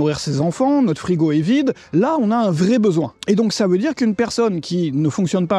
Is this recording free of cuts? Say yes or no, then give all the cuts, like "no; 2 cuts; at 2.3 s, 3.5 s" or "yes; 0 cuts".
no; 2 cuts; at 1.8 s, 3.2 s